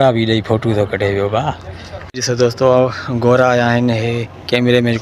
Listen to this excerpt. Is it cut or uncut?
cut